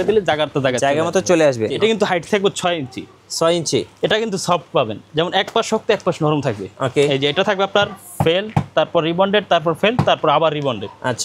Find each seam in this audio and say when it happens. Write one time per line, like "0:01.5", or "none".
0:01.8